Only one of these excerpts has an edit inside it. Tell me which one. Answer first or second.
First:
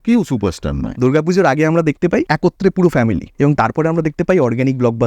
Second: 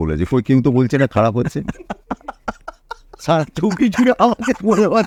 first